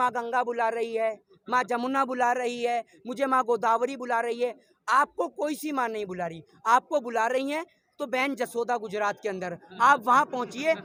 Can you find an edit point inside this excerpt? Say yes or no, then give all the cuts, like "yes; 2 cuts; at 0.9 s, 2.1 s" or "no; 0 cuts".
no; 0 cuts